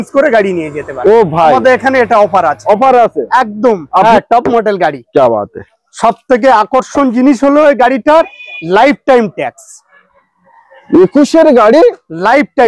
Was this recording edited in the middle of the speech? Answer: yes; 1 cut; at 4.0 s

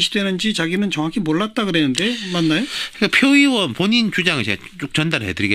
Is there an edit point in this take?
no; 0 cuts

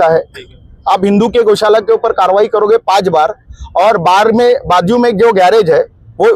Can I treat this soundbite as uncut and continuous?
yes; 0 cuts

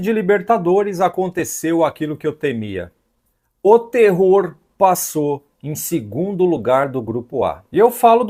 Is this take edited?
no; 0 cuts

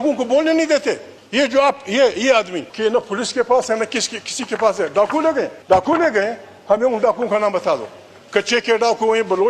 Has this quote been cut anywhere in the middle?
yes; 3 cuts; at 1.2 s, 2.6 s, 5.6 s

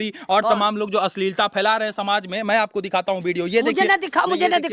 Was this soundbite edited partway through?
no; 0 cuts

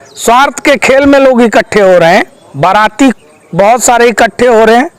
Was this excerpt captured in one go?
no; 1 cut; at 2.4 s

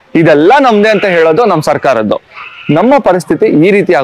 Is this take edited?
no; 0 cuts

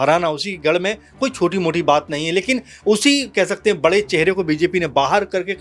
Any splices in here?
no; 0 cuts

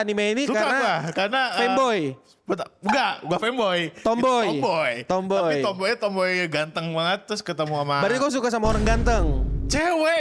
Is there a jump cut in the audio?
no; 0 cuts

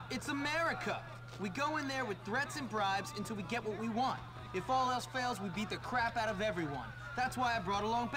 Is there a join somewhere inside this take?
no; 0 cuts

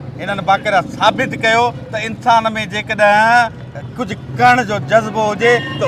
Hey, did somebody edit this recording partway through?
no; 0 cuts

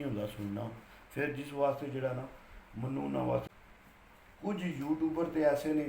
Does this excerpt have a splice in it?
yes; 1 cut; at 3.5 s

